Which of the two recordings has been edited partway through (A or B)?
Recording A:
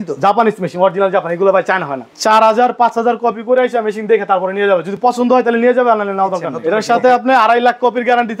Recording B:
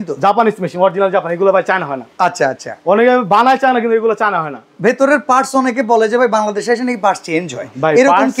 A